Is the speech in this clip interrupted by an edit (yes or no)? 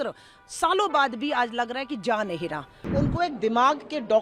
yes